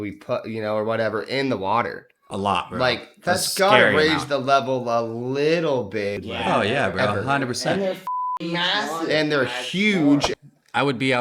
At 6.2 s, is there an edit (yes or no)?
yes